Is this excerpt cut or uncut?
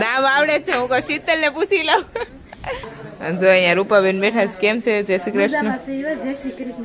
cut